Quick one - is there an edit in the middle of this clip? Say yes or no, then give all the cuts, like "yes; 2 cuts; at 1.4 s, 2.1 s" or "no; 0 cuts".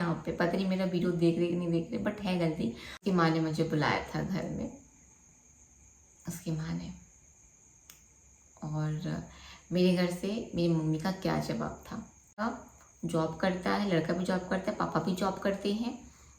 yes; 2 cuts; at 3.0 s, 12.4 s